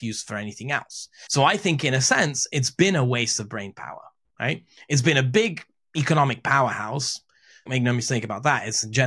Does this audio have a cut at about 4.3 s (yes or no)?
no